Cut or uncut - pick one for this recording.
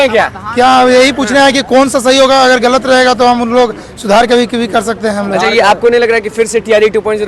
uncut